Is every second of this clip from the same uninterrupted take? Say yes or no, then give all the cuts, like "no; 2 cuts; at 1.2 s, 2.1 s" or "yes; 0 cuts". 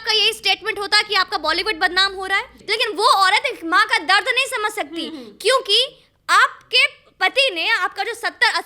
no; 1 cut; at 2.6 s